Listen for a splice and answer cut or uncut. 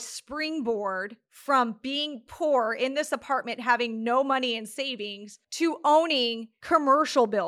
uncut